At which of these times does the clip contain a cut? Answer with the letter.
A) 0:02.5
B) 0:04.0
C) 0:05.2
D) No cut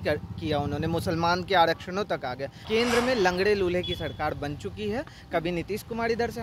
A